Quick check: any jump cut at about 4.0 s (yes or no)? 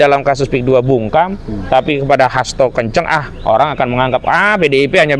no